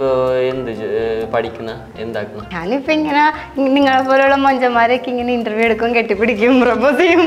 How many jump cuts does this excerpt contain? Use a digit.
1